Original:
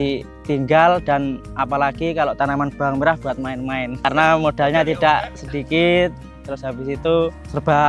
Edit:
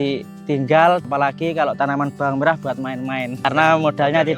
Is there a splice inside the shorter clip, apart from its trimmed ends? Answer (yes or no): yes